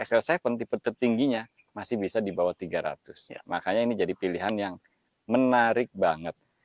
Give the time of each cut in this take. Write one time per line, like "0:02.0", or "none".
none

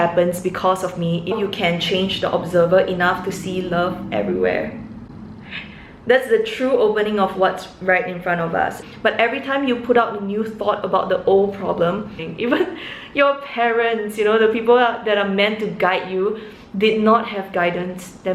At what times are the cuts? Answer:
0:01.3
0:08.8
0:12.2

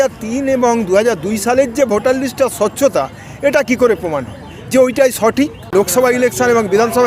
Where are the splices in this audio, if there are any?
0:05.6

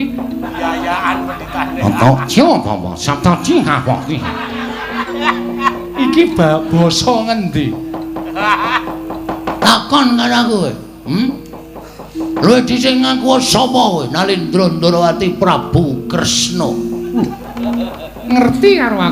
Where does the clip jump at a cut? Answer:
0:05.1

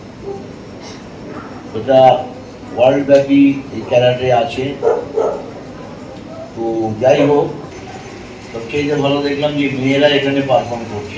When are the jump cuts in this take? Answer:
0:07.8

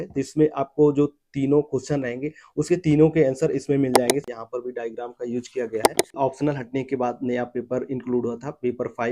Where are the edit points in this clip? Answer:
0:04.3
0:06.1

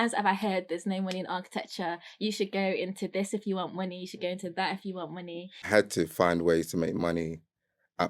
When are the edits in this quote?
0:05.7

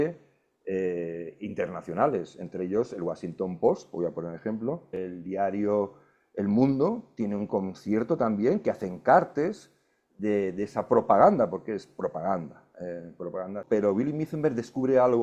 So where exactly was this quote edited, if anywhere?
0:05.0
0:13.6

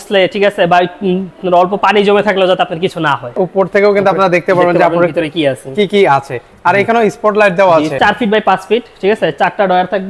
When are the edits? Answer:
0:03.3
0:08.0

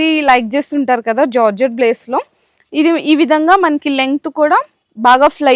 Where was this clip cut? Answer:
none

